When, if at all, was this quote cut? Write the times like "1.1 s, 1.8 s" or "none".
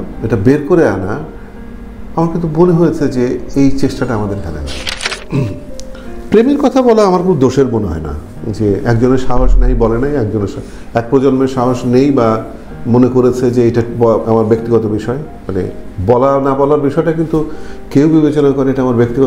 5.2 s